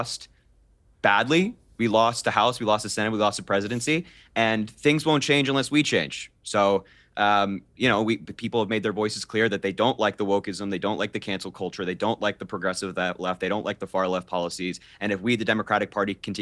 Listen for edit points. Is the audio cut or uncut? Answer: uncut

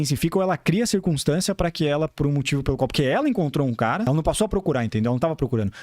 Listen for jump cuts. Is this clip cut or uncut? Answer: cut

